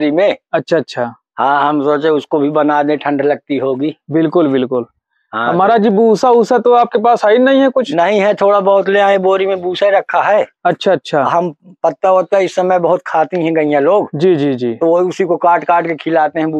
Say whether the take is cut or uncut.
uncut